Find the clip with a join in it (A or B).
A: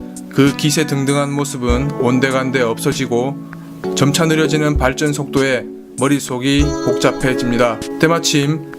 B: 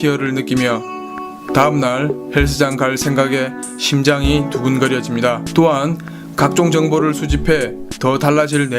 B